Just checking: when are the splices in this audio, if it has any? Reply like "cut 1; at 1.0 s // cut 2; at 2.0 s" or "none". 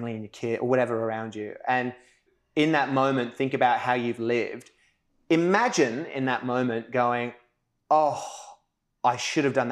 cut 1; at 2.3 s